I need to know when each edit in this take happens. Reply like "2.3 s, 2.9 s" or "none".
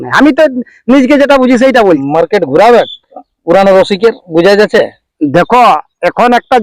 2.0 s